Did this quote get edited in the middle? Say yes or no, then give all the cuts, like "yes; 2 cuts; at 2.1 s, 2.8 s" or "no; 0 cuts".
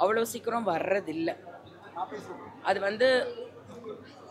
no; 0 cuts